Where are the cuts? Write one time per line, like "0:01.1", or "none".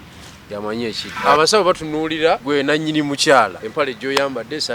0:01.1
0:02.4
0:03.6